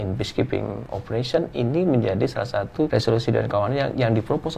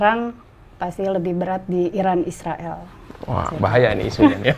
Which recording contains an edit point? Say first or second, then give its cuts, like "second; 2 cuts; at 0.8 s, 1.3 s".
first; 2 cuts; at 0.9 s, 2.9 s